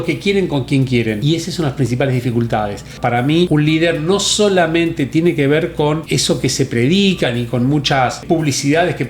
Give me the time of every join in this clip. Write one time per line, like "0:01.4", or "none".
0:01.2
0:03.2
0:06.1
0:08.2

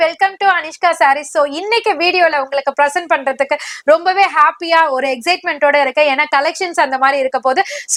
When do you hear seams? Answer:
none

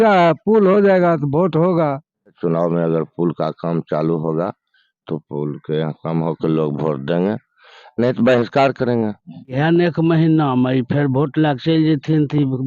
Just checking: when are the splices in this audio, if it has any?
0:02.4
0:09.6

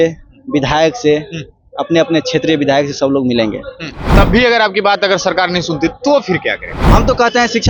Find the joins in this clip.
0:04.1
0:06.8

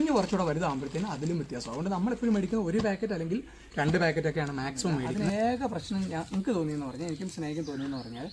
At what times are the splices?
0:05.1

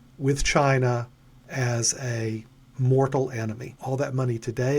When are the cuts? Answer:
0:03.7

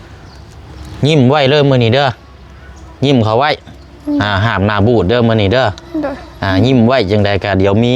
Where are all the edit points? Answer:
none

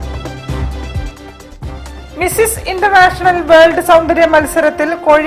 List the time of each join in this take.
0:01.8

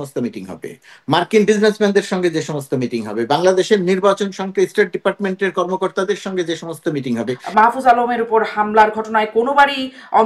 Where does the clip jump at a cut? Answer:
0:07.4

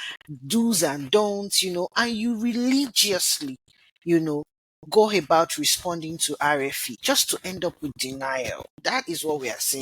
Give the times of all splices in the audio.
0:06.9
0:08.7

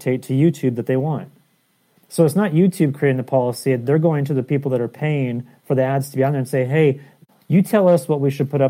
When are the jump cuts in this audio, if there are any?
0:07.2

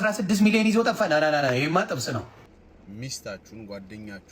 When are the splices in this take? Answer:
0:02.4

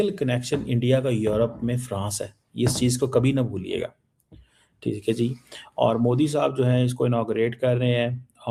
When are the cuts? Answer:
none

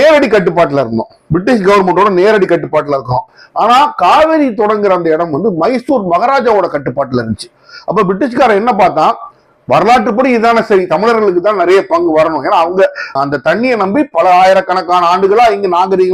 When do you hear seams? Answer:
none

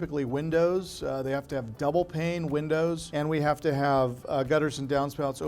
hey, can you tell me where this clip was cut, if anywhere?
0:03.0

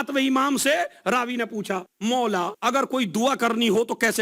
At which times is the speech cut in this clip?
0:01.9
0:02.5

